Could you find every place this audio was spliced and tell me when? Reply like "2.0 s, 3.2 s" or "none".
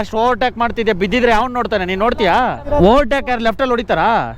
2.7 s